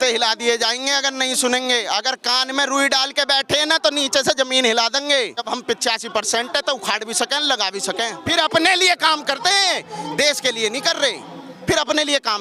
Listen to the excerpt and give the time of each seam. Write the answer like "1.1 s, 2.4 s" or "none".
5.5 s, 8.2 s

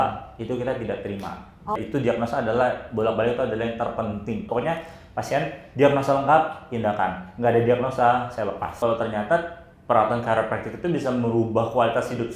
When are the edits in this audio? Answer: 1.8 s, 4.5 s, 8.8 s

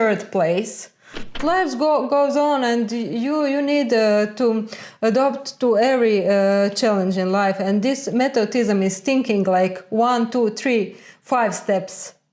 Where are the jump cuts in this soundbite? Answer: 1.3 s

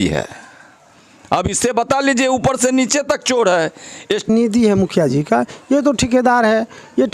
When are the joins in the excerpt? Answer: 4.3 s

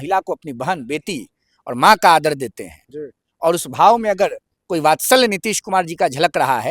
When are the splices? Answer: none

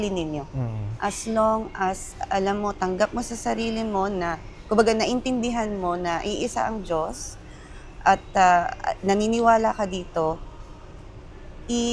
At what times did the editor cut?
none

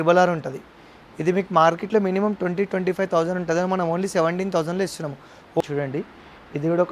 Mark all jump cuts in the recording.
5.6 s

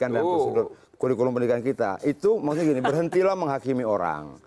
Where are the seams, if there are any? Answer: none

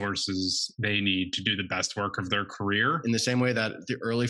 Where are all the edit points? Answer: 3.0 s

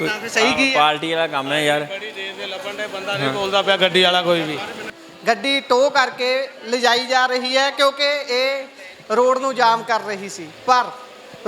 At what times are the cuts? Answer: 5.0 s

